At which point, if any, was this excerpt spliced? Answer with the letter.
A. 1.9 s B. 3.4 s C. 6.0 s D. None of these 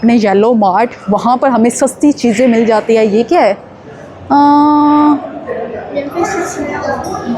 D